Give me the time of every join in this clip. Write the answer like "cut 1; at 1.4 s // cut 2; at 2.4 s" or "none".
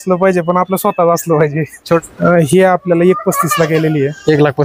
cut 1; at 1.8 s